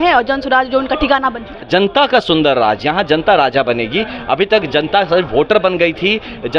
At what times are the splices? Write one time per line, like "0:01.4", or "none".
0:01.6